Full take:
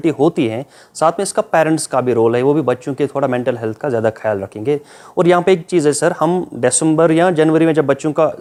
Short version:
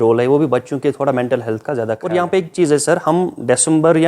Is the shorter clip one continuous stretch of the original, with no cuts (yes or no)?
no